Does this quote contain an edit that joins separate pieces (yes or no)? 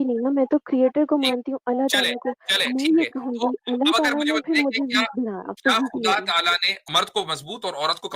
yes